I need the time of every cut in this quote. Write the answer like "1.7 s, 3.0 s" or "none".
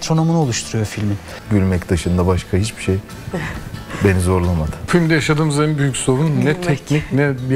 1.3 s, 4.8 s